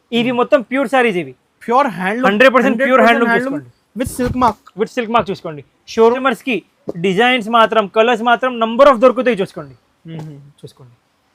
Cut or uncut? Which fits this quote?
cut